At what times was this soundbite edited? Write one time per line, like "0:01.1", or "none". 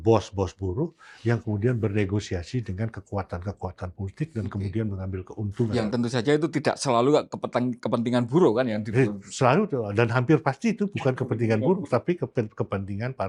none